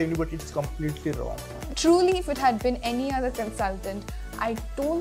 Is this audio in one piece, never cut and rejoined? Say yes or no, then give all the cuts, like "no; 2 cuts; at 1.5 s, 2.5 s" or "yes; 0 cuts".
no; 1 cut; at 1.5 s